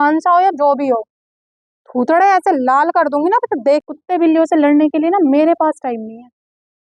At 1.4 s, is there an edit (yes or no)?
no